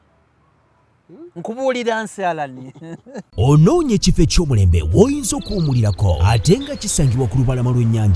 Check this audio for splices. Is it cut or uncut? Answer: cut